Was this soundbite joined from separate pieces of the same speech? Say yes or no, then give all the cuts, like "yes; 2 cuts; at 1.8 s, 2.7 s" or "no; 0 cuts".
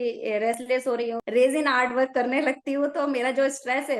yes; 1 cut; at 1.0 s